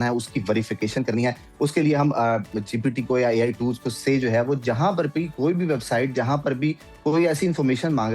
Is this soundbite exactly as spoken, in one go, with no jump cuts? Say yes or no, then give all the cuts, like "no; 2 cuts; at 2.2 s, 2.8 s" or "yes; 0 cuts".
yes; 0 cuts